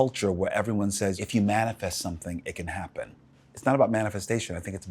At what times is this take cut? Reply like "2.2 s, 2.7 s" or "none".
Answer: 1.2 s, 3.3 s